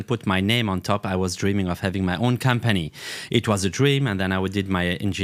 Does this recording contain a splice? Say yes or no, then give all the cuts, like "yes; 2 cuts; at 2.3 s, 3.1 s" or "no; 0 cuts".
no; 0 cuts